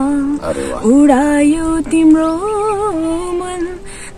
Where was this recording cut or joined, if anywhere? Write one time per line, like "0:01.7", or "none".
none